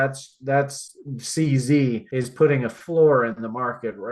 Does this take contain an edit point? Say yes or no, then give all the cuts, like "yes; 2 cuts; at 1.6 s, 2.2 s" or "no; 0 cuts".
yes; 1 cut; at 2.1 s